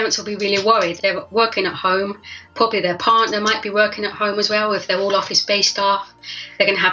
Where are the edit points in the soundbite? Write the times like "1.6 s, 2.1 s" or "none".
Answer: 0.9 s, 2.4 s